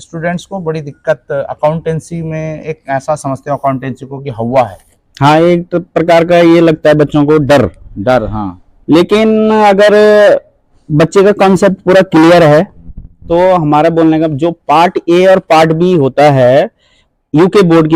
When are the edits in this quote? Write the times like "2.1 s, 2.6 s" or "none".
none